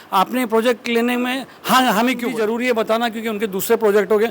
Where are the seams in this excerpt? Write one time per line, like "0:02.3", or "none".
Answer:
0:02.3